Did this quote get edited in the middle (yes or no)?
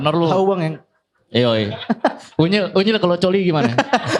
no